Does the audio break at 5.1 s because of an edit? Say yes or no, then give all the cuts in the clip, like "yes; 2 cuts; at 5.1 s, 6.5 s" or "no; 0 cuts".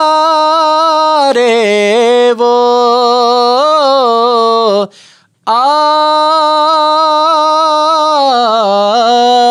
no; 0 cuts